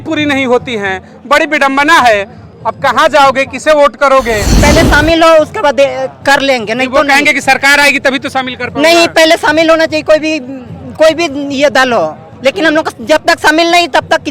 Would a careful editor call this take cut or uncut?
cut